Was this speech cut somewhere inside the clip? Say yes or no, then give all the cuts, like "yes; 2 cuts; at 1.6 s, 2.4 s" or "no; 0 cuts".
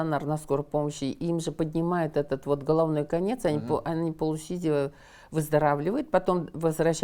no; 0 cuts